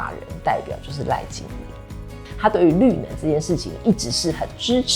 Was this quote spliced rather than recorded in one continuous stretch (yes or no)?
yes